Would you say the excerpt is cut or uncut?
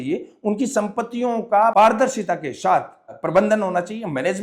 cut